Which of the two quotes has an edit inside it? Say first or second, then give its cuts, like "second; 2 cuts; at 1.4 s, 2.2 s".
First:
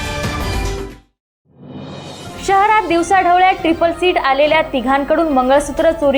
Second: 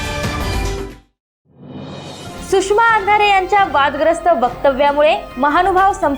second; 1 cut; at 2.1 s